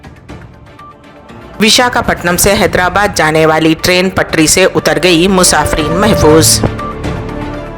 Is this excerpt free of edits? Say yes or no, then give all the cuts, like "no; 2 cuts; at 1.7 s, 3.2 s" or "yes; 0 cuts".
no; 1 cut; at 1.5 s